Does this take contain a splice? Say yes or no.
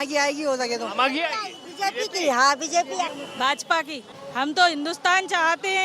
yes